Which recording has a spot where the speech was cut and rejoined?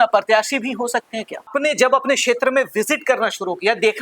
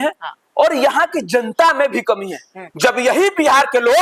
first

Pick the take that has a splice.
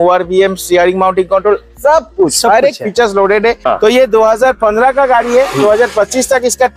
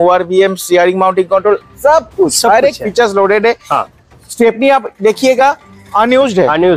first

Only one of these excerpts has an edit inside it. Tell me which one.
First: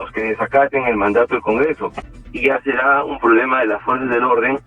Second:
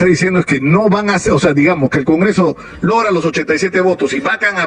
first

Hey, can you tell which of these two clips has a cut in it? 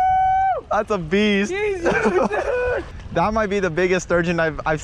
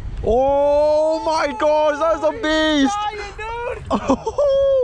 first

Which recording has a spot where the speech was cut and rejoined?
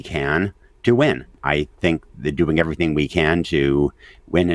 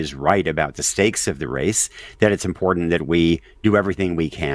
first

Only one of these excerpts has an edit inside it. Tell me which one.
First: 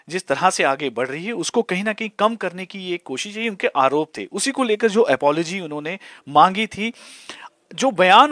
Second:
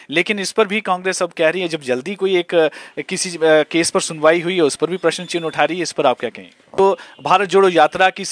second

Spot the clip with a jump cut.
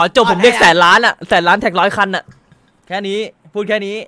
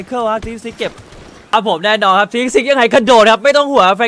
second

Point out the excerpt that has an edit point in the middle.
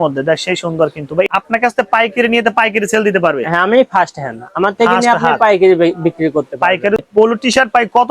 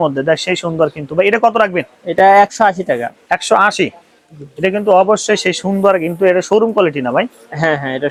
first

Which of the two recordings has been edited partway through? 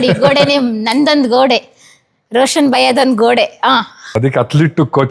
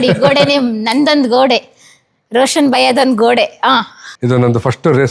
second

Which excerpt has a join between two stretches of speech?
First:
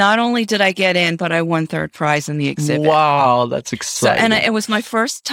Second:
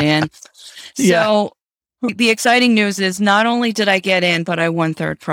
second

